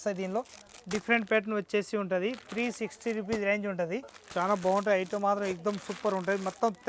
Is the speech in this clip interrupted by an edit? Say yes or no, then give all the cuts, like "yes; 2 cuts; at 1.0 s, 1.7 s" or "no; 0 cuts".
yes; 1 cut; at 4.2 s